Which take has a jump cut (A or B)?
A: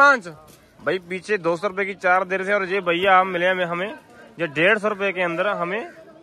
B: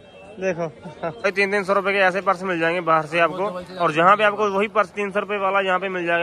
B